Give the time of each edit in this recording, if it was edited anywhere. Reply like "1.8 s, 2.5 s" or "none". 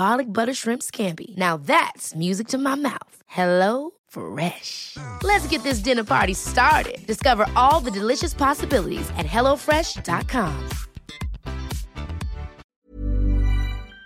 12.7 s

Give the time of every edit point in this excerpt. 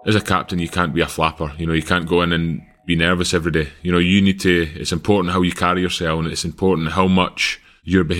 none

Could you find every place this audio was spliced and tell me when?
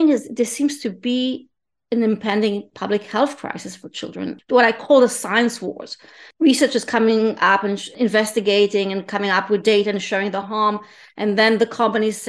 4.4 s, 6.6 s, 7.9 s

